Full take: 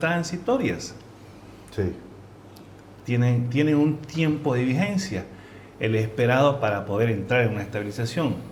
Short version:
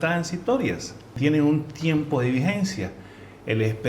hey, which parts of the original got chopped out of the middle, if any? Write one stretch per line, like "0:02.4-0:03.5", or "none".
0:01.1-0:03.5